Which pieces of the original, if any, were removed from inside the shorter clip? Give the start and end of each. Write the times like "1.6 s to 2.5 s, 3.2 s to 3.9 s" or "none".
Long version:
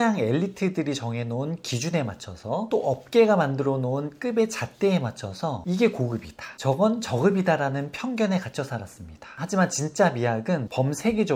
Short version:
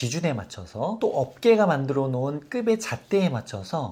none